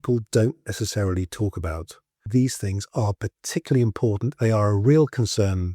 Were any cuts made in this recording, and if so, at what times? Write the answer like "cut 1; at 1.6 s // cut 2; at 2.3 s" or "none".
cut 1; at 2.2 s